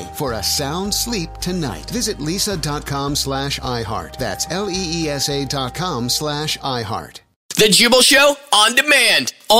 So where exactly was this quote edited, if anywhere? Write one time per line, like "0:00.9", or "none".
0:07.5